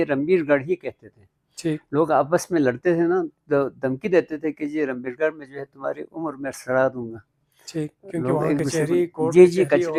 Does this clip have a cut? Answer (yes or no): no